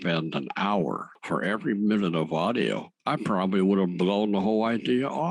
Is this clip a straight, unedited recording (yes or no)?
yes